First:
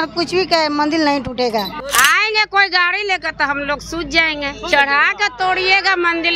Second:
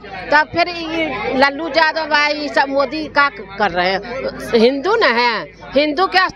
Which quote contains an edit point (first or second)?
first